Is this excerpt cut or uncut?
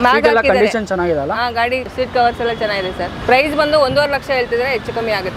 uncut